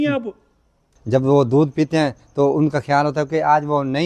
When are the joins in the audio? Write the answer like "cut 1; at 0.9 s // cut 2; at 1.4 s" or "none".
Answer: cut 1; at 0.9 s